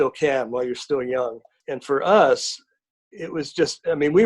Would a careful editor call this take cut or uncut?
cut